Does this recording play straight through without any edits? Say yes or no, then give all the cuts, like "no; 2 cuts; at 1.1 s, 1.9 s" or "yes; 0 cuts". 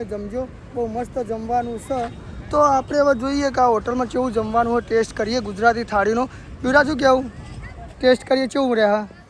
yes; 0 cuts